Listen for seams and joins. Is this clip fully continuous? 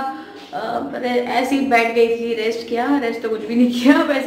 yes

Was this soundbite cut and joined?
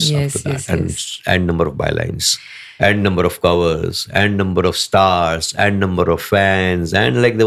no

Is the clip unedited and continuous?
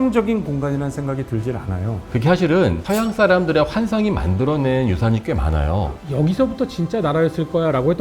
no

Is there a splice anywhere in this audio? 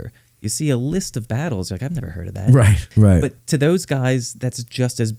yes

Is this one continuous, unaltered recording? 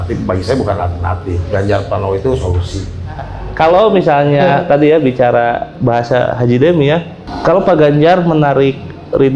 no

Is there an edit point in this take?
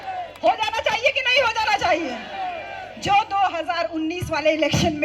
no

